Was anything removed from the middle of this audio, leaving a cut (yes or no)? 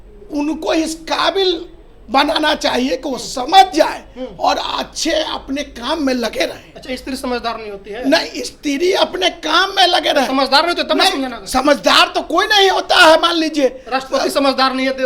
no